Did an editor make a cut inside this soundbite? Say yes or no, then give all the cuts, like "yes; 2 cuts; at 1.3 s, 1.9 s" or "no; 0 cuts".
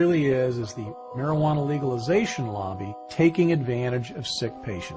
yes; 1 cut; at 3.9 s